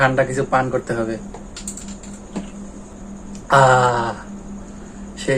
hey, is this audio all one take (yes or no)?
no